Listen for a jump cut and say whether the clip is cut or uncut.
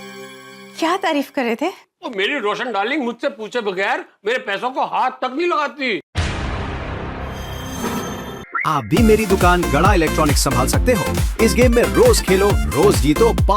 cut